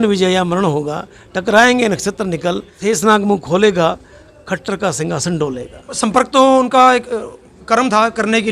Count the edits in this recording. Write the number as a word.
two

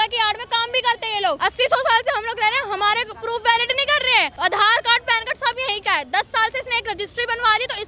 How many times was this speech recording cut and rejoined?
two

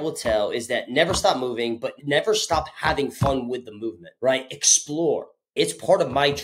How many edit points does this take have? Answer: two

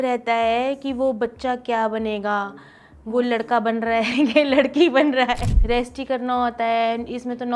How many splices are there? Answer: one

